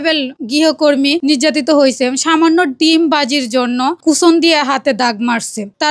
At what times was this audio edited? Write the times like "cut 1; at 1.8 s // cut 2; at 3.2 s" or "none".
none